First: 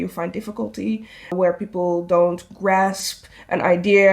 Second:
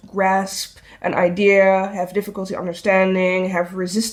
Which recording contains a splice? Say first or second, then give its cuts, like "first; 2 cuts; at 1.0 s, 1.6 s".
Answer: first; 1 cut; at 1.3 s